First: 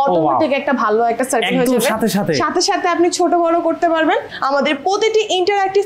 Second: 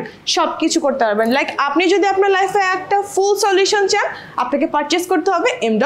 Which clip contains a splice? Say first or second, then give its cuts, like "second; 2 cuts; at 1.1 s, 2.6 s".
first; 1 cut; at 4.3 s